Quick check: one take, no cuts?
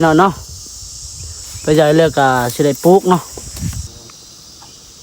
no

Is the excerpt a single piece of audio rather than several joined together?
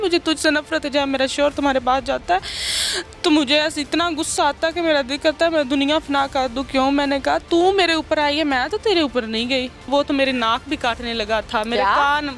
no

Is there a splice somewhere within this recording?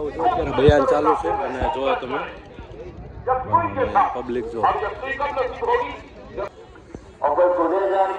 yes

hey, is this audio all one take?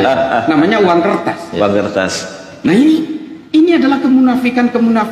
yes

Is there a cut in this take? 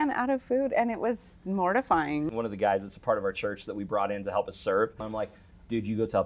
yes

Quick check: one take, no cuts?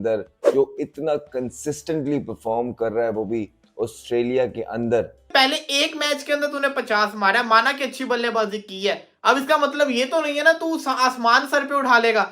no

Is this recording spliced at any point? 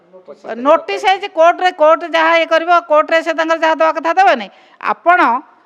no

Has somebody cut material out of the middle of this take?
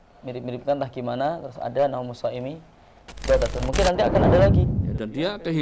yes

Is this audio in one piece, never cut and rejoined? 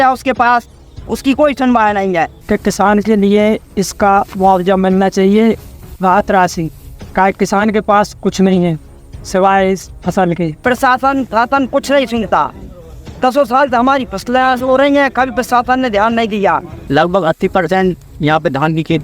no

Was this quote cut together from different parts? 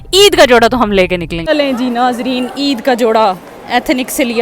yes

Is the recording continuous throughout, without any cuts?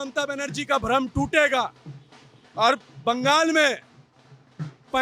yes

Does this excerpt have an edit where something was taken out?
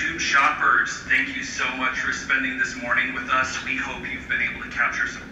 no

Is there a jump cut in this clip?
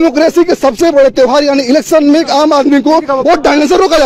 no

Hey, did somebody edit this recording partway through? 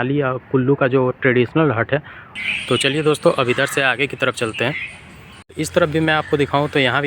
yes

